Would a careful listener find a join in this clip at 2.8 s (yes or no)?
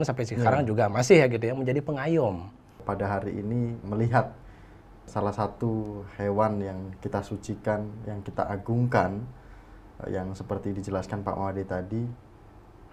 yes